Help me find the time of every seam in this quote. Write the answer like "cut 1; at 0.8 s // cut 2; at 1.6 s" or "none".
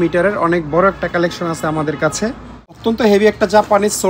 cut 1; at 2.8 s